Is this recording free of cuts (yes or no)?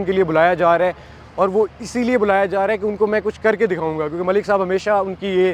yes